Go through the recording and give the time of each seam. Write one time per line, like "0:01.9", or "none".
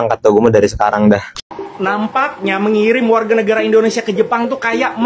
0:01.3